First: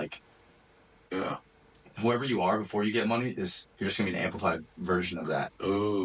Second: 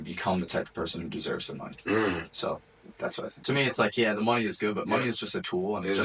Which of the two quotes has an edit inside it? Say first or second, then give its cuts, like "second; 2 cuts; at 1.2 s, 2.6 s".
second; 1 cut; at 3.4 s